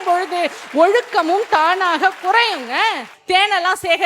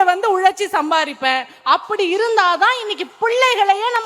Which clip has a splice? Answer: first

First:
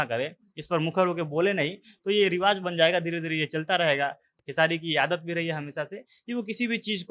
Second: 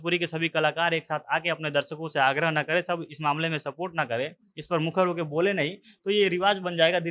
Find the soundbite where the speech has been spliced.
first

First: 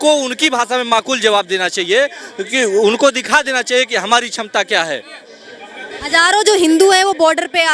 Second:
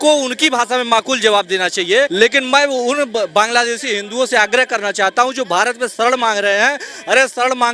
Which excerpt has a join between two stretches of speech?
second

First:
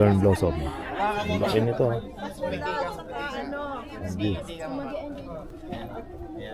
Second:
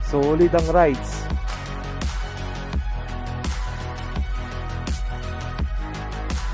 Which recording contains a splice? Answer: second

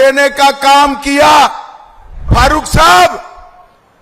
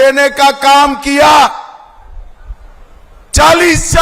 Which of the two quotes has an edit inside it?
first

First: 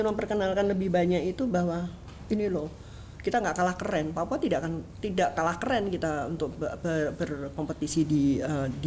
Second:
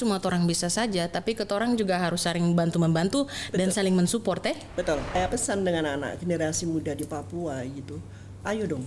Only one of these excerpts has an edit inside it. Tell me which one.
second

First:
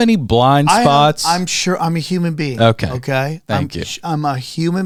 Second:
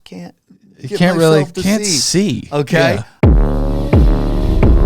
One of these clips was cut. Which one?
second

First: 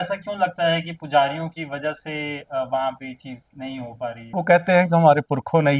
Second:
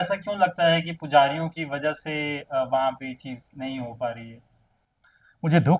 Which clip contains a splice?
first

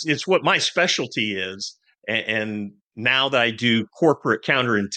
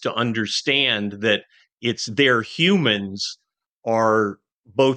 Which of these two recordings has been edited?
first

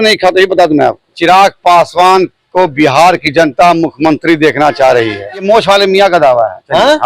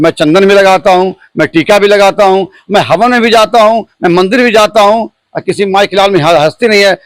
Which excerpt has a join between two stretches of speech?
first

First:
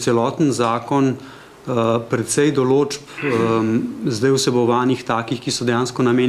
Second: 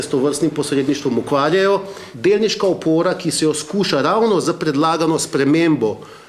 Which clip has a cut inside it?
second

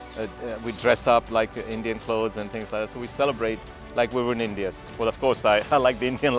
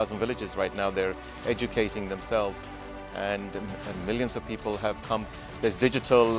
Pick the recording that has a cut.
first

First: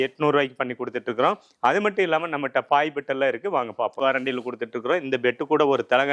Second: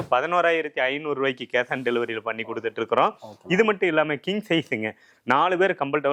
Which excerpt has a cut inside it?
first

